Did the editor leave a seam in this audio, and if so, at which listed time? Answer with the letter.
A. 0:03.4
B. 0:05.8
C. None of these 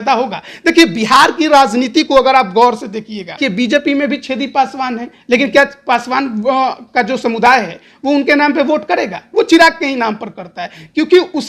A